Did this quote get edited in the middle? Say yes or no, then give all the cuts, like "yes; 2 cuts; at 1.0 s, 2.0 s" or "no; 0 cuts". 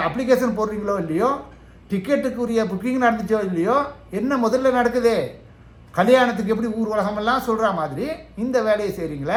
no; 0 cuts